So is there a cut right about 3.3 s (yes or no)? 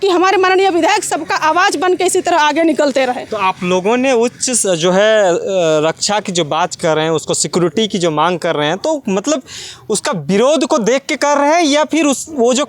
no